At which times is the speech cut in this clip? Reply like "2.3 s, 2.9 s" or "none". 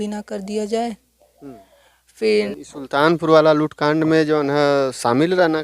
2.5 s

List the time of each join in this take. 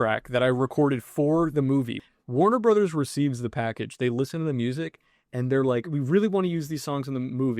2.0 s, 5.9 s

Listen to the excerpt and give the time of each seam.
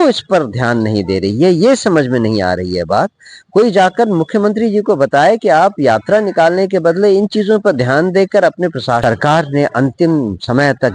9.0 s

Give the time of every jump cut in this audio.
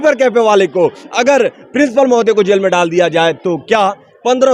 none

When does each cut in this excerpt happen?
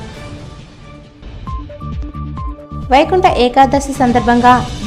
2.7 s

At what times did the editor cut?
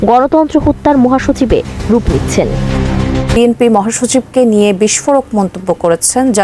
3.4 s

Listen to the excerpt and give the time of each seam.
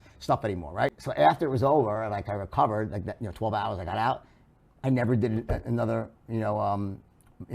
1.0 s

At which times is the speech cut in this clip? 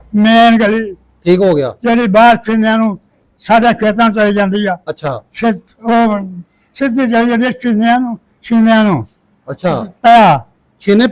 none

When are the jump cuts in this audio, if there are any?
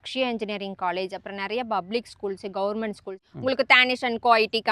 3.1 s

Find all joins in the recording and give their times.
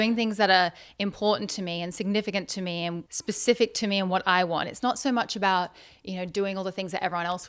3.0 s

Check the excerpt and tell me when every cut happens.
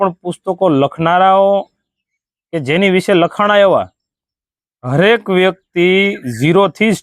none

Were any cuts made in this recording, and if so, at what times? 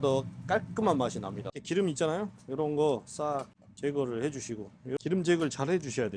1.6 s, 5.0 s

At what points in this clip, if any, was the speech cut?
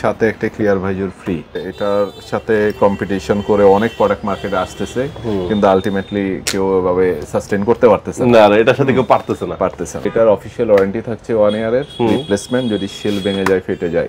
1.5 s, 10.0 s

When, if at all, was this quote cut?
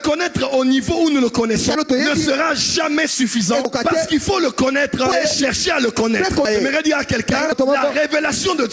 1.8 s, 3.7 s, 5.1 s, 6.4 s, 7.5 s

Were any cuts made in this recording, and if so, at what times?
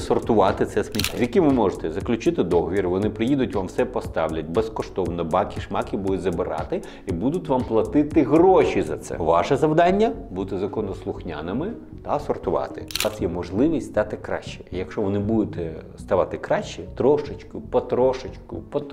1.1 s, 13.0 s

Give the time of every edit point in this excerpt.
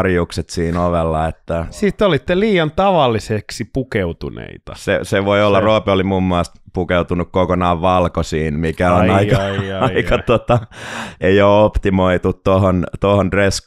1.8 s

